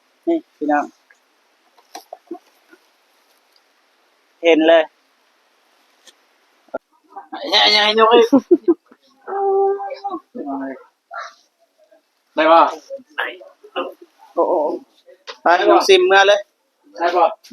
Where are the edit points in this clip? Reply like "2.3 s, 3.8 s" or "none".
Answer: 6.9 s